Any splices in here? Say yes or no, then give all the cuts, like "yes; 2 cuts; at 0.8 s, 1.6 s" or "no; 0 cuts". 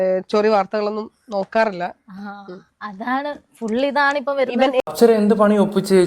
yes; 1 cut; at 4.8 s